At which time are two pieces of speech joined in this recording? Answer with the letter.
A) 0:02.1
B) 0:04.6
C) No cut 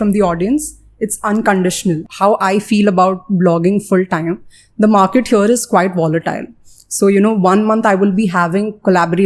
A